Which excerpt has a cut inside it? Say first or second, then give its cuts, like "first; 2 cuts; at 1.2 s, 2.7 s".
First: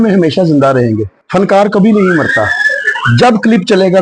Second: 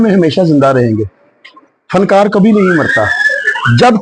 first; 1 cut; at 1.1 s